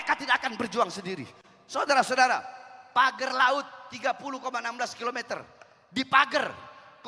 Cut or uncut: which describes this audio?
uncut